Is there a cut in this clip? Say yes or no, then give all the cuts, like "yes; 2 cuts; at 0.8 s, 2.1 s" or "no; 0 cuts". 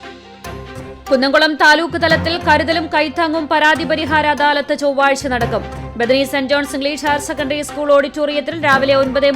yes; 1 cut; at 1.1 s